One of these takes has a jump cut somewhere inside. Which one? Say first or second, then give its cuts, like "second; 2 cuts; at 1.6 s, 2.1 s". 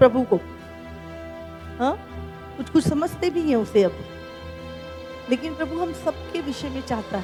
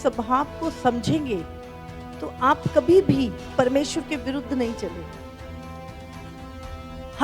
second; 1 cut; at 3.4 s